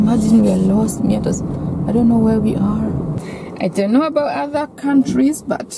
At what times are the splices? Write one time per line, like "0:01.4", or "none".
0:03.2